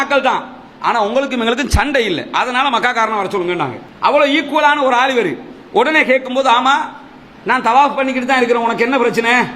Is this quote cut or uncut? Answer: uncut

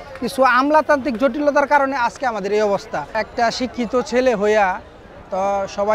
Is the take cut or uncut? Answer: cut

